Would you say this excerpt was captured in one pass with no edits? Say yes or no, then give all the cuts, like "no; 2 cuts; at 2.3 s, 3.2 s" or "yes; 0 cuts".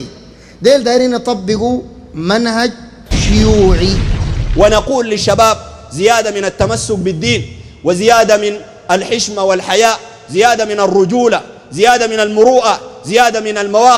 no; 1 cut; at 4.4 s